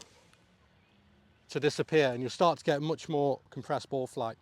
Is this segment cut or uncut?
cut